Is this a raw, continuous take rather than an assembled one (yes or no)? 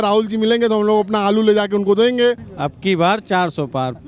no